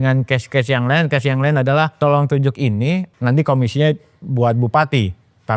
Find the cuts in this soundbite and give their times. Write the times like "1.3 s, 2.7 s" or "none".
2.0 s, 3.1 s